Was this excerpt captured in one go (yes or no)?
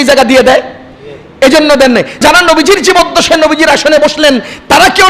no